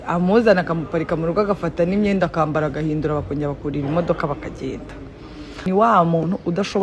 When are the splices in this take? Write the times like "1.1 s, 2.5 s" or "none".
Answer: 5.5 s